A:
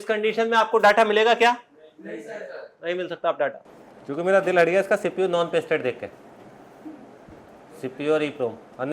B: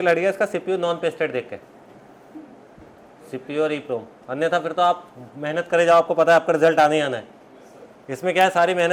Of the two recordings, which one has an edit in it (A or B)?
A